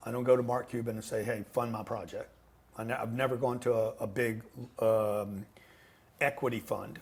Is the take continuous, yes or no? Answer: yes